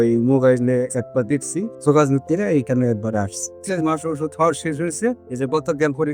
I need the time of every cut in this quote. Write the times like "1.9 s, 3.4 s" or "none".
1.7 s, 3.6 s